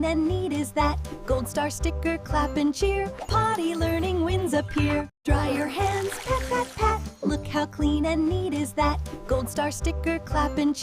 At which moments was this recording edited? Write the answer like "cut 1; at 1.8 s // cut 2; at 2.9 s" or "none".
cut 1; at 5.1 s